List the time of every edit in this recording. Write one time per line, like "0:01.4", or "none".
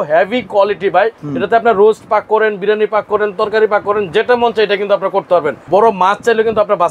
0:01.2
0:05.6